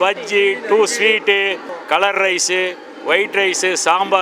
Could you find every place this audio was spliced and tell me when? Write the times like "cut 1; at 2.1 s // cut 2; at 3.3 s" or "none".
cut 1; at 1.7 s